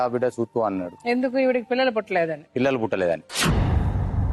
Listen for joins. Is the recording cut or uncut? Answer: cut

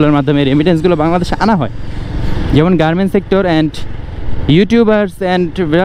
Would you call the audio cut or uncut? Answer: uncut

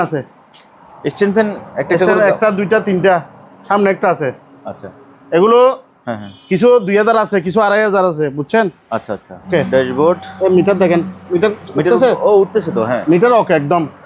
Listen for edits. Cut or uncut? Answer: cut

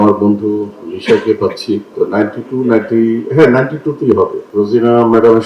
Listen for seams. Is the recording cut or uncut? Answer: cut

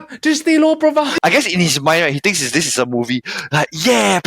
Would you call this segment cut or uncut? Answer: cut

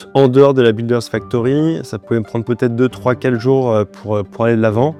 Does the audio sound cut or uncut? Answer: uncut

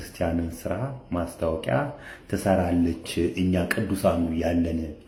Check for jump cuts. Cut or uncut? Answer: uncut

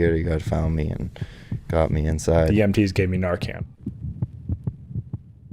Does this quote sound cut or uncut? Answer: cut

